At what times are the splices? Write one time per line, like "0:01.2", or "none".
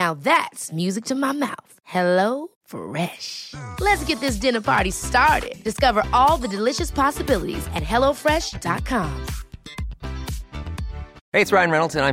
0:11.1

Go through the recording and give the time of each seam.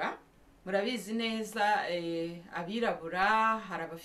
none

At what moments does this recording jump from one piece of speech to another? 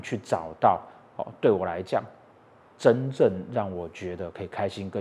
none

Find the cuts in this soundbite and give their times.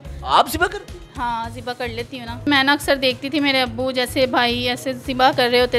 0:02.5

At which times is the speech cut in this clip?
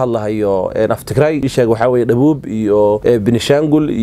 0:01.5
0:03.0

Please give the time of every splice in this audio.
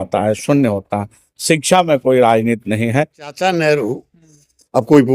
0:03.3

